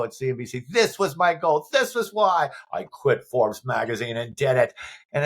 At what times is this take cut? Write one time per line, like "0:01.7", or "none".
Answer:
none